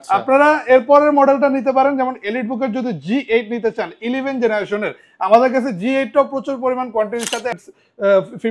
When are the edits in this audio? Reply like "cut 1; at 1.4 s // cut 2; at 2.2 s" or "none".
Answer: cut 1; at 7.5 s